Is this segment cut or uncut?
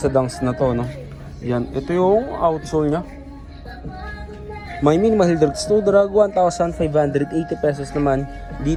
uncut